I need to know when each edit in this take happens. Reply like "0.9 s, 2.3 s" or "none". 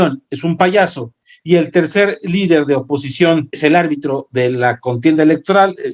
3.4 s